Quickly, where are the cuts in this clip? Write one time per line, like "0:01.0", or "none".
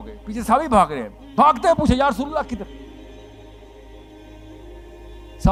none